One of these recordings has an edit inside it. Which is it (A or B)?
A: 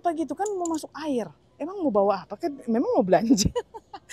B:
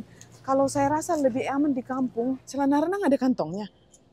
B